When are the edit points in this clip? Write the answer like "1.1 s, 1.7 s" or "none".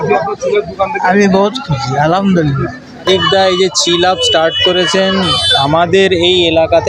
3.0 s